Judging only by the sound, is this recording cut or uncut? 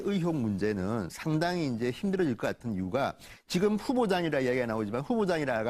cut